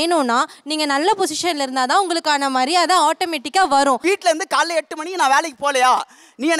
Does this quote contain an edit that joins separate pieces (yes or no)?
no